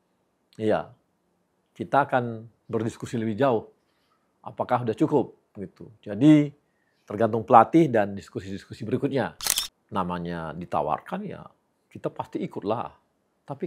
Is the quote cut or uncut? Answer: cut